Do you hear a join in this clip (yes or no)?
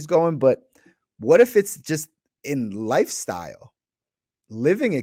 no